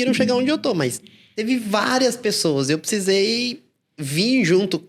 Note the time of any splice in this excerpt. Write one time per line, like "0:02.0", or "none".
none